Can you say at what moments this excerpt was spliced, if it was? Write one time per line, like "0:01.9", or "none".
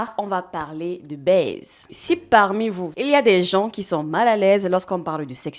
0:01.9
0:02.9